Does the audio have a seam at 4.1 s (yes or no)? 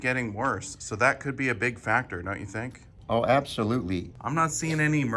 yes